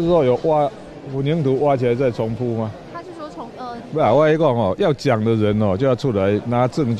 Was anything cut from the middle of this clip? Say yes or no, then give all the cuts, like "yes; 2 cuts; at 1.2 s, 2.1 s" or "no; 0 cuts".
no; 0 cuts